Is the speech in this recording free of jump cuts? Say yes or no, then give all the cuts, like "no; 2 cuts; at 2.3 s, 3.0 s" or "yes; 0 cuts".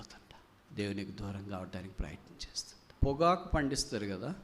no; 1 cut; at 2.9 s